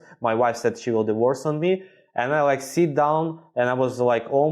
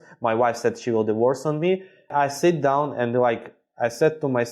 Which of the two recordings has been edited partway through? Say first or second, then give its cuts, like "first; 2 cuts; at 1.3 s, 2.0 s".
second; 1 cut; at 2.1 s